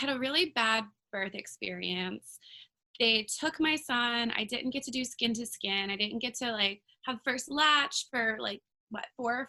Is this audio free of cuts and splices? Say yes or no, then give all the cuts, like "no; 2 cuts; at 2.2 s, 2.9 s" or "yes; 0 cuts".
yes; 0 cuts